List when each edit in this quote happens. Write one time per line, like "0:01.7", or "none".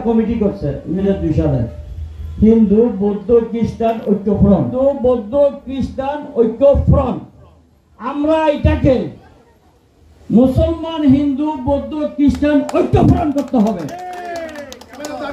0:01.1
0:04.7